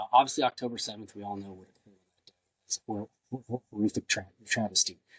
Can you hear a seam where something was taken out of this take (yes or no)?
no